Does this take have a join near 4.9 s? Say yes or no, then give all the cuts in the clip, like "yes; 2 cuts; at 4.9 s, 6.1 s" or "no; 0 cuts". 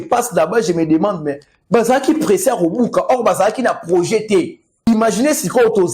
yes; 1 cut; at 4.9 s